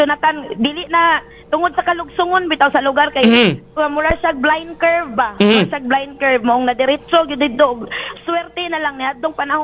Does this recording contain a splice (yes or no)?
no